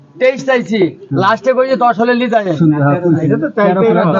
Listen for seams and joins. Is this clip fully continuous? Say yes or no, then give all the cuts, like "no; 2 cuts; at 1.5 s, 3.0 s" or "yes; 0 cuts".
yes; 0 cuts